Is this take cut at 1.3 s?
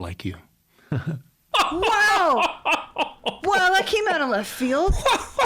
yes; 1 cut; at 1.3 s

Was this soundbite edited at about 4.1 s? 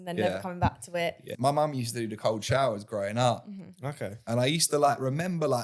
yes; 2 cuts; at 1.3 s, 4.1 s

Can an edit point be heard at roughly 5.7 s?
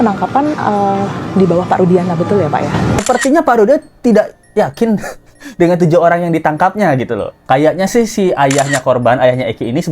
no; 2 cuts; at 3.0 s, 7.4 s

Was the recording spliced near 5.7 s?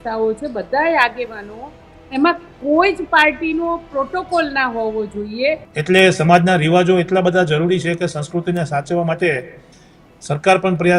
yes; 1 cut; at 5.7 s

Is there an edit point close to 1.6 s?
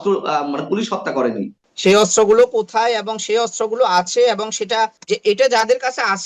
yes; 2 cuts; at 1.6 s, 5.0 s

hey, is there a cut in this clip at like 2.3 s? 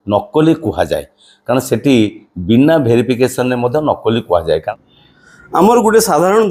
no; 1 cut; at 4.6 s

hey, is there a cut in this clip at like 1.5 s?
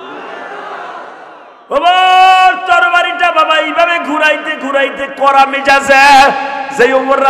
yes; 1 cut; at 1.5 s

